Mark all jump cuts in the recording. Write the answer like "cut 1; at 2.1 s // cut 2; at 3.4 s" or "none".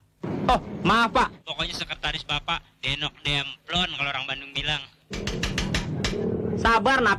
cut 1; at 1.5 s // cut 2; at 5.3 s